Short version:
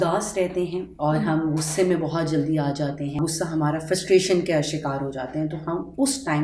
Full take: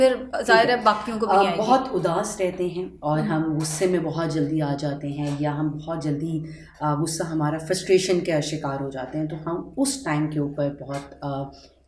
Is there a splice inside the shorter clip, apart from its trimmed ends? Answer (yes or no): yes